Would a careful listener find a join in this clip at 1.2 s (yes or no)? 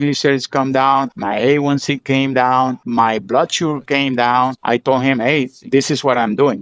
yes